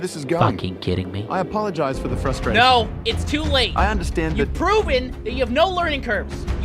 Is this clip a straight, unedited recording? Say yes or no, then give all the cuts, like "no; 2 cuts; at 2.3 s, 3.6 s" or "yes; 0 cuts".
yes; 0 cuts